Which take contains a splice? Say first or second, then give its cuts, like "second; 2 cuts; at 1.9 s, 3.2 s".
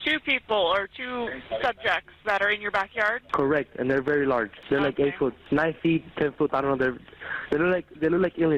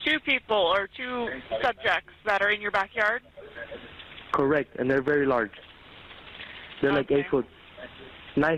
first; 3 cuts; at 3.2 s, 4.6 s, 5.4 s